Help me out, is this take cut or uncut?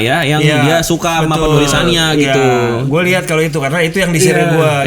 uncut